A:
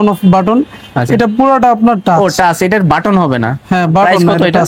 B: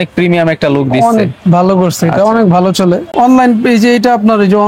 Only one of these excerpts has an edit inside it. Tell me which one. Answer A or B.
B